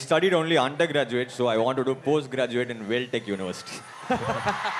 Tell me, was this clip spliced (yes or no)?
no